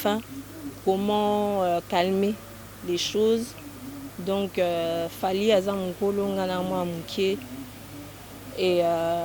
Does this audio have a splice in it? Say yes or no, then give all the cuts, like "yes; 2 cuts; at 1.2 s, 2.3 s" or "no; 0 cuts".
no; 0 cuts